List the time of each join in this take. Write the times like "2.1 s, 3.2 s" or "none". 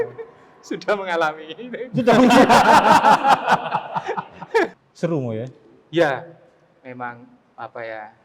4.8 s